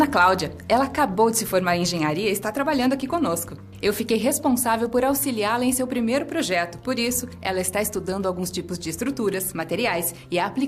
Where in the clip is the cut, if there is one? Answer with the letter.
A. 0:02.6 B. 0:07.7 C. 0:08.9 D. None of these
C